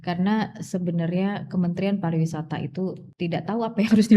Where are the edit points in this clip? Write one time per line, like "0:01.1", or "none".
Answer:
0:03.0

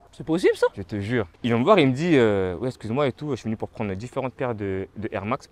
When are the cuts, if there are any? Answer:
0:01.3

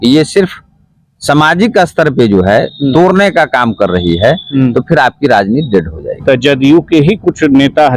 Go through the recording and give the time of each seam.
0:06.1

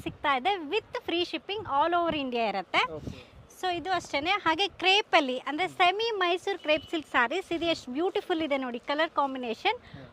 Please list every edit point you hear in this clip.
none

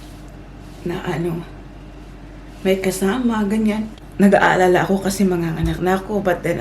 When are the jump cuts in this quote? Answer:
0:04.0

